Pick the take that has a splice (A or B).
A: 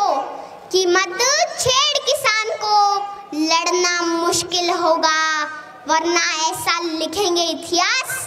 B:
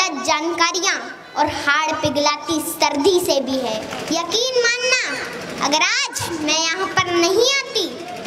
B